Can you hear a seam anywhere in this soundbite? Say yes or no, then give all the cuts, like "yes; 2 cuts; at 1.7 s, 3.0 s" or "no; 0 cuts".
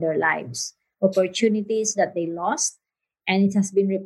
no; 0 cuts